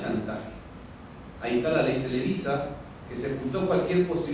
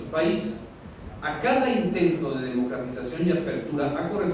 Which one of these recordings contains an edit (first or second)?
second